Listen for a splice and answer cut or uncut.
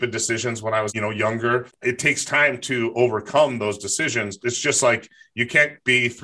cut